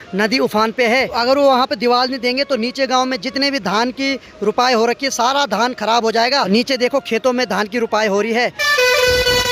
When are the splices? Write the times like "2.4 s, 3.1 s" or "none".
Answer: 1.1 s, 6.5 s, 8.6 s